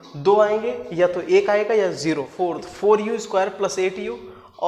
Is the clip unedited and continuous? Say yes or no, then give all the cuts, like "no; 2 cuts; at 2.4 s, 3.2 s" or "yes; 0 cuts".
no; 1 cut; at 2.3 s